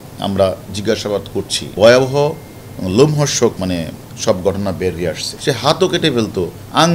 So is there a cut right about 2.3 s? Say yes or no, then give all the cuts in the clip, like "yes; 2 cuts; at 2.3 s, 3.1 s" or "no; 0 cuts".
no; 2 cuts; at 3.6 s, 5.3 s